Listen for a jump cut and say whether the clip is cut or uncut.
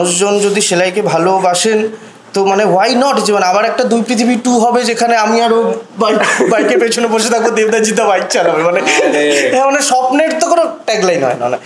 uncut